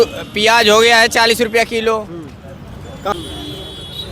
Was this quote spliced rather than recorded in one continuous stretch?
yes; 1 cut; at 3.1 s

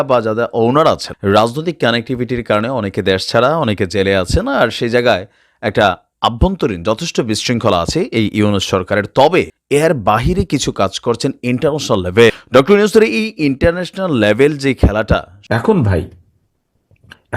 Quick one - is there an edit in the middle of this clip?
yes; 4 cuts; at 1.1 s, 9.6 s, 12.4 s, 15.3 s

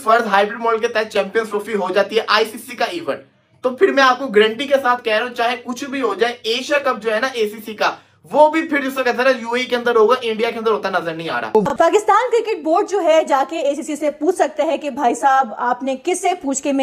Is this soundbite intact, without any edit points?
no; 1 cut; at 11.7 s

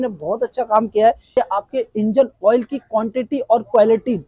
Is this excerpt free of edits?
no; 1 cut; at 1.3 s

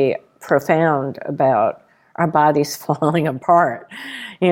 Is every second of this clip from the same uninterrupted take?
yes; 0 cuts

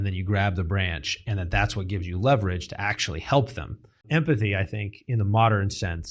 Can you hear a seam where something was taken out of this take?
yes; 1 cut; at 4.0 s

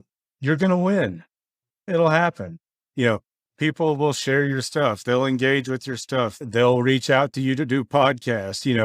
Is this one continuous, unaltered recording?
no; 1 cut; at 6.4 s

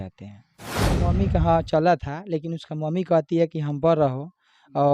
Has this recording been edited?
yes; 1 cut; at 1.0 s

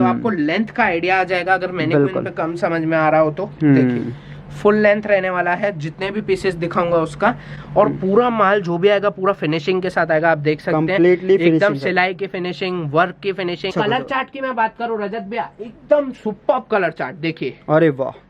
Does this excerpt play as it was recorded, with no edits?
no; 1 cut; at 13.7 s

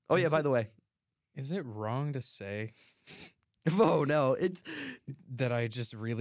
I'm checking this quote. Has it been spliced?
no; 0 cuts

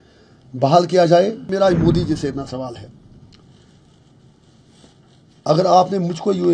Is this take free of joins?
no; 1 cut; at 1.5 s

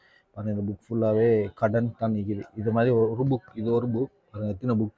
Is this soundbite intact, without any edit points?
yes; 0 cuts

